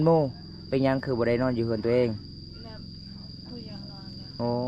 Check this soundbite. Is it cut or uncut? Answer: uncut